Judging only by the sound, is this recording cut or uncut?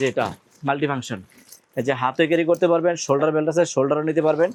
uncut